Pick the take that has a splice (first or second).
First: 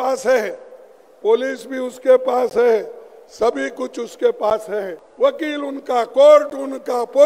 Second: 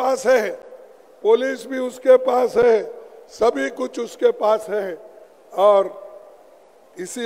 first